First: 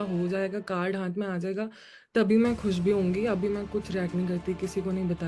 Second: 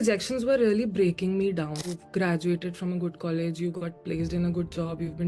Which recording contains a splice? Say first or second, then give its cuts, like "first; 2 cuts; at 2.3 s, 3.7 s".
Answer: second; 1 cut; at 1.8 s